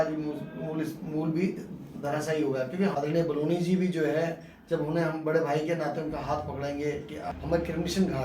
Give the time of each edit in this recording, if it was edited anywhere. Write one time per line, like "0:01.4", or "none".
0:02.9
0:07.3